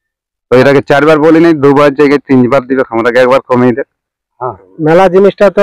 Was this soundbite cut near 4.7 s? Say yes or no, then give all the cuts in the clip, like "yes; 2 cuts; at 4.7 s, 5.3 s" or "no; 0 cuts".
yes; 1 cut; at 4.7 s